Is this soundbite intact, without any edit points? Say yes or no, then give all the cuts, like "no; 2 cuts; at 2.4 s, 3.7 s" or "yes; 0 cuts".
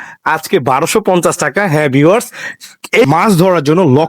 no; 1 cut; at 3.1 s